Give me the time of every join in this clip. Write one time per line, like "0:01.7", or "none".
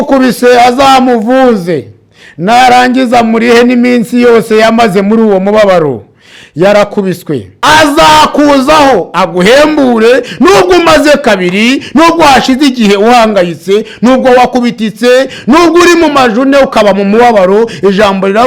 0:07.5